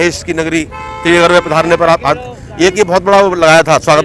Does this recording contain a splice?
no; 0 cuts

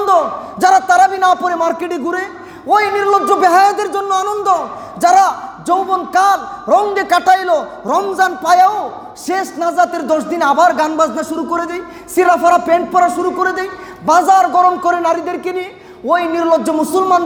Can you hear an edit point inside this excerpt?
no; 0 cuts

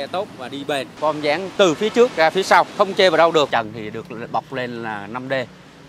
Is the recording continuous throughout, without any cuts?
no; 3 cuts; at 1.1 s, 2.7 s, 3.5 s

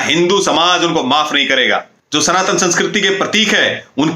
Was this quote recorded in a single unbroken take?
no; 1 cut; at 2.0 s

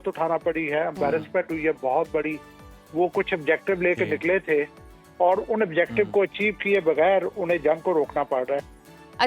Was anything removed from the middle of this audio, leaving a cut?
no; 0 cuts

